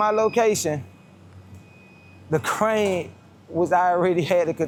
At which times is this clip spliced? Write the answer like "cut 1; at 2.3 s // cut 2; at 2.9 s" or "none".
none